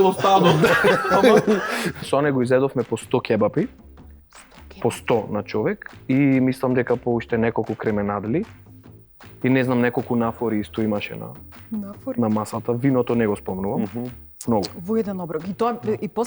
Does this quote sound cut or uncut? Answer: cut